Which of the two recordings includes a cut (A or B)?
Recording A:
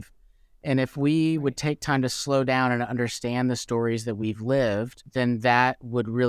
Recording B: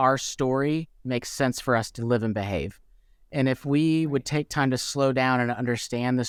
A